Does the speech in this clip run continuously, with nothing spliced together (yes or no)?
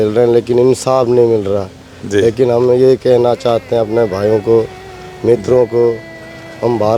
yes